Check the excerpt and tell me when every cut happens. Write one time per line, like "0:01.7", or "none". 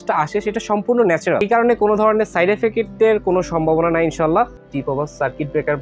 0:01.4
0:04.7